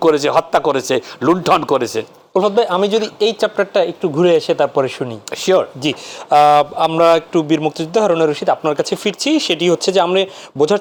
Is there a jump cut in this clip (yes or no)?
no